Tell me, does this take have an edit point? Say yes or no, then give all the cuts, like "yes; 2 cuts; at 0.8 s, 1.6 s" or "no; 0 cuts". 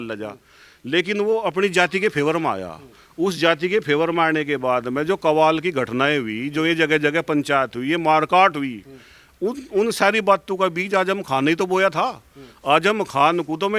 no; 0 cuts